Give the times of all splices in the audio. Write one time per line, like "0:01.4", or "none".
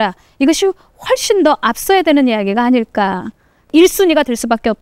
0:03.7